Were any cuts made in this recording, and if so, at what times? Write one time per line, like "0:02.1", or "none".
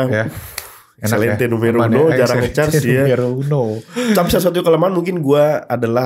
none